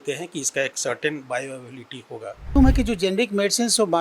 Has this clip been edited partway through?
yes; 1 cut; at 2.6 s

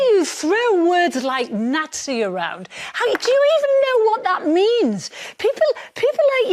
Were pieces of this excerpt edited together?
no; 0 cuts

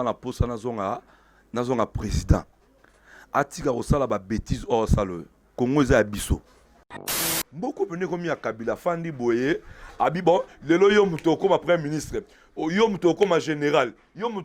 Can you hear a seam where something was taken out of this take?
yes; 1 cut; at 7.2 s

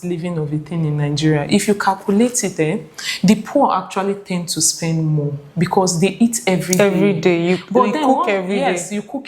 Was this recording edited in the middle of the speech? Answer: no; 0 cuts

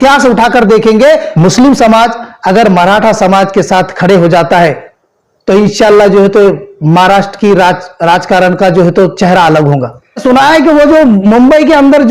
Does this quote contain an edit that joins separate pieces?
yes; 2 cuts; at 1.3 s, 10.2 s

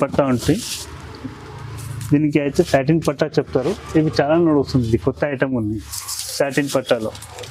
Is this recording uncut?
yes; 0 cuts

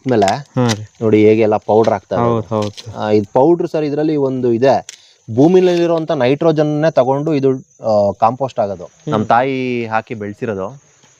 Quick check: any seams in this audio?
yes; 1 cut; at 8.9 s

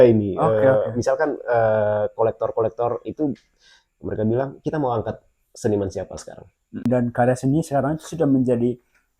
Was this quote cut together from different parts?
yes; 1 cut; at 6.8 s

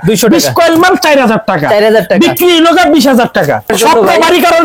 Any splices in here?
yes; 1 cut; at 3.7 s

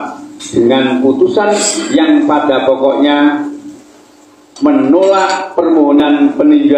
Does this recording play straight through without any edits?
yes; 0 cuts

